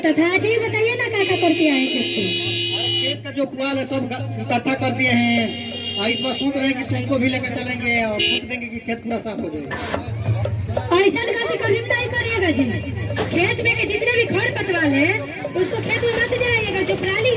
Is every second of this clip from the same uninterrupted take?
yes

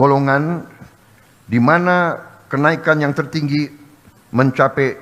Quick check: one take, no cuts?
yes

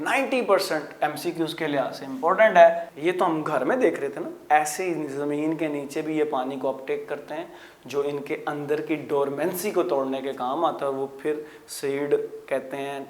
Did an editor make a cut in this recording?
yes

